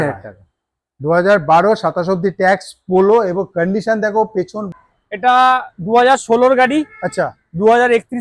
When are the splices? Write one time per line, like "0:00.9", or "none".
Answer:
0:04.6

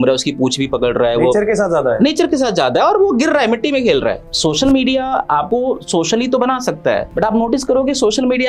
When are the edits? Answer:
0:04.3
0:05.5
0:07.1

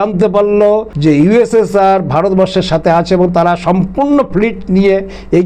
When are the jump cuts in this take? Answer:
0:00.9

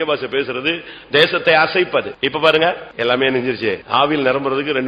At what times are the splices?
0:02.1
0:02.9
0:03.8

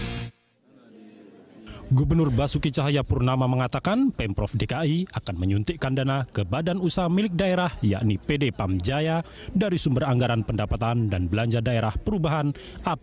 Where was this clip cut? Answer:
0:02.3

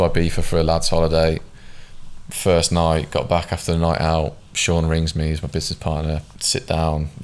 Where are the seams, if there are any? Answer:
0:06.3

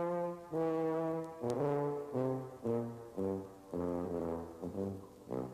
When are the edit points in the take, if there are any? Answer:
none

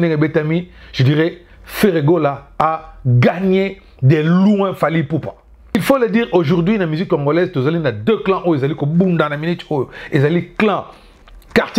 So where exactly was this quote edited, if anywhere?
0:05.8

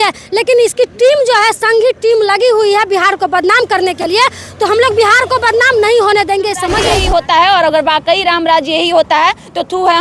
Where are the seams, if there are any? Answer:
0:06.9

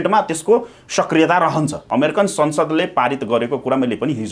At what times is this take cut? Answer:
0:01.8

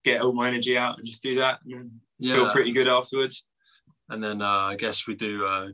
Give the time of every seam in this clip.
none

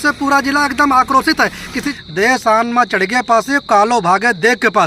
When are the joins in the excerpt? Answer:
0:01.9

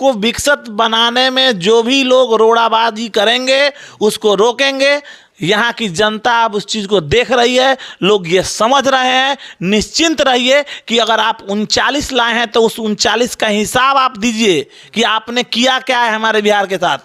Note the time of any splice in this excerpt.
none

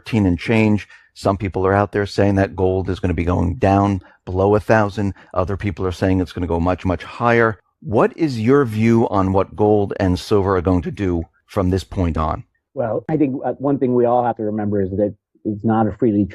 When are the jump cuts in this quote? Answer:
none

